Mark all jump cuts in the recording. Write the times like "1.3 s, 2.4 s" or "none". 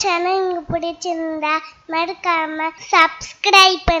2.8 s

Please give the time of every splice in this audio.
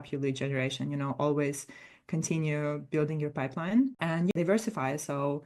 4.3 s

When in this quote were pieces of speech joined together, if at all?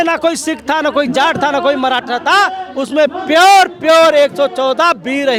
none

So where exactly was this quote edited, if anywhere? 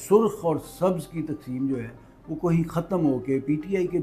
none

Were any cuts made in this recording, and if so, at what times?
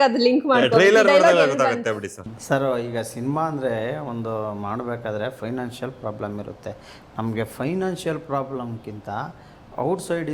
2.3 s

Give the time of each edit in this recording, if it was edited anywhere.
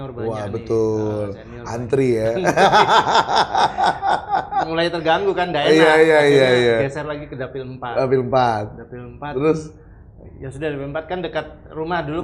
none

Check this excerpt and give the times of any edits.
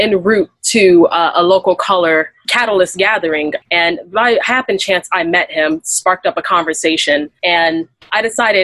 3.6 s, 7.3 s

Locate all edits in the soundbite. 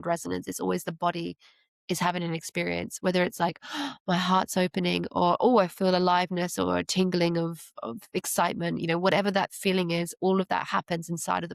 none

